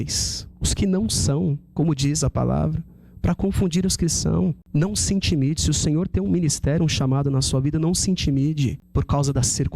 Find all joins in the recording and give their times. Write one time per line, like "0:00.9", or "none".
0:04.6
0:08.8